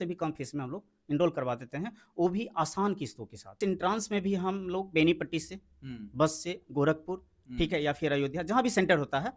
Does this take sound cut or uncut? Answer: cut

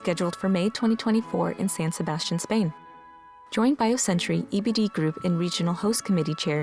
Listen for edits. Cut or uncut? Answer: uncut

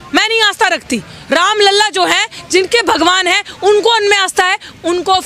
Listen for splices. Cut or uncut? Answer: uncut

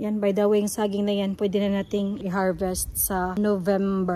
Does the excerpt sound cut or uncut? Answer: cut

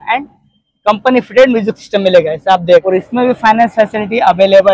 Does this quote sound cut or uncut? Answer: cut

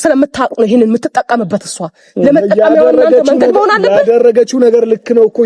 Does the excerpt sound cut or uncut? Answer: uncut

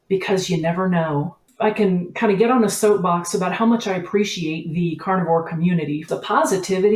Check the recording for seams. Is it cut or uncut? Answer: cut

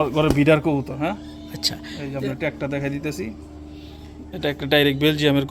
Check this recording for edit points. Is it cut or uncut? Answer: uncut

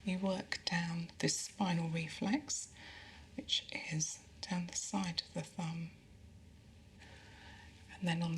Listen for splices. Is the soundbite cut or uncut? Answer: cut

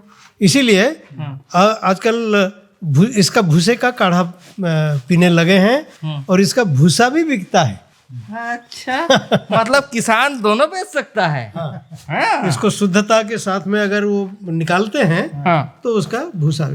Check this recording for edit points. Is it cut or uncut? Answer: uncut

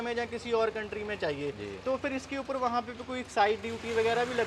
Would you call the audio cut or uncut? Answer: uncut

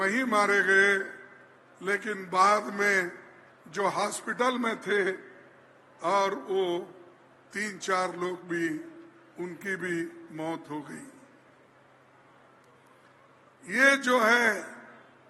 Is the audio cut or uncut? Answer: uncut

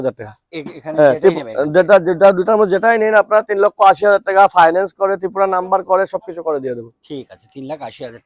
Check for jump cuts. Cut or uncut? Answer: uncut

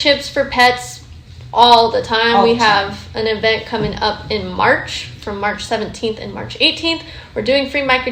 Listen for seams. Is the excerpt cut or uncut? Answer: uncut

